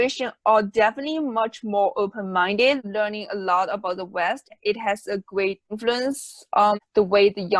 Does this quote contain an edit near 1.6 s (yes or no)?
no